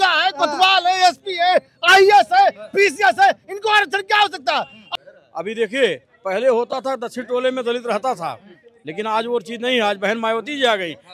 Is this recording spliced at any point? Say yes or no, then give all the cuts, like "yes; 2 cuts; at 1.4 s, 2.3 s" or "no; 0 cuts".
yes; 1 cut; at 4.9 s